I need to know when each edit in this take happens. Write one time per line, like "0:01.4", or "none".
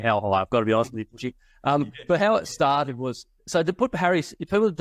none